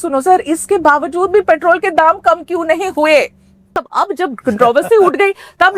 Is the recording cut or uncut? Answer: cut